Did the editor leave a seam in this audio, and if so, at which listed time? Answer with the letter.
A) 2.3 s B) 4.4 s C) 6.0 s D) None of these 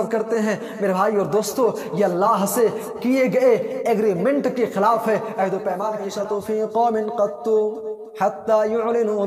C